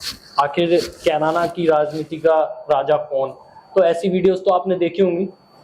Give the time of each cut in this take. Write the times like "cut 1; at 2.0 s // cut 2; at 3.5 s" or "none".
none